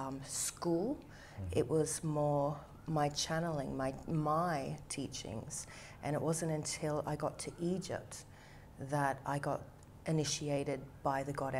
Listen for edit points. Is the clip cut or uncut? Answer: uncut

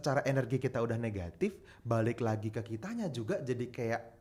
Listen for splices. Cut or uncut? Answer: uncut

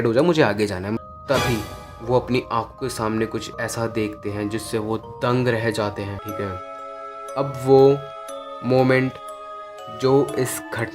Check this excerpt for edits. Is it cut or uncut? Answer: cut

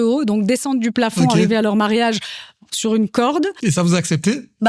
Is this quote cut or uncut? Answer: uncut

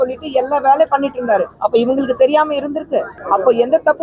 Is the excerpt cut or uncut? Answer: cut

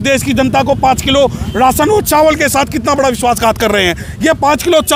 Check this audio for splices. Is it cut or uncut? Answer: uncut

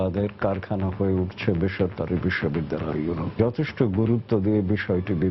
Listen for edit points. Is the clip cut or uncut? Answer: cut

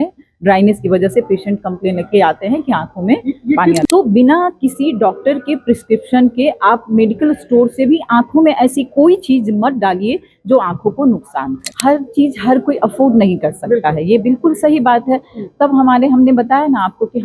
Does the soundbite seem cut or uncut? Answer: cut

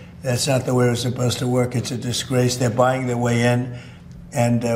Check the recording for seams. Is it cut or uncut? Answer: uncut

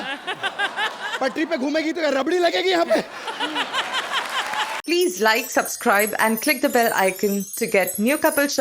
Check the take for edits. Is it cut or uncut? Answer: cut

